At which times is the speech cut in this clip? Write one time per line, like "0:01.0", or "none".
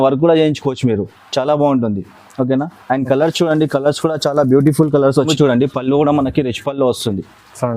0:05.3